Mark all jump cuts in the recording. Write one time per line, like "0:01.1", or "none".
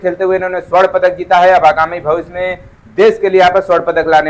none